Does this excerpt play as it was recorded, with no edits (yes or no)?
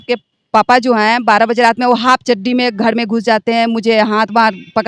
yes